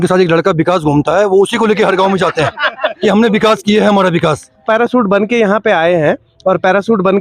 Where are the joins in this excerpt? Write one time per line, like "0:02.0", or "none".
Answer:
0:04.6